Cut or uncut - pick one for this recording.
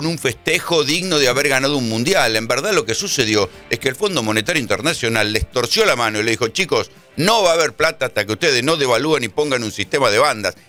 uncut